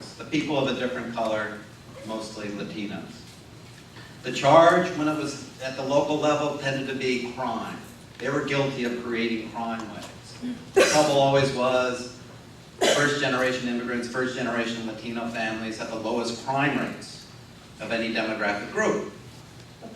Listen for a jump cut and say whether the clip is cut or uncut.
cut